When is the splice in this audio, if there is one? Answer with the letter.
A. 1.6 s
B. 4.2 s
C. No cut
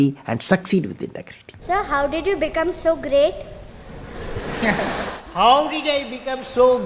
A